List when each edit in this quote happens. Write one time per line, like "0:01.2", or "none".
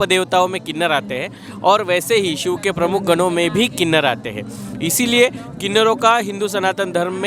none